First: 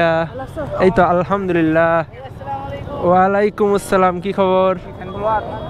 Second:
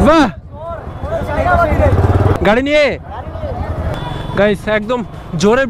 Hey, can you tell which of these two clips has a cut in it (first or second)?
second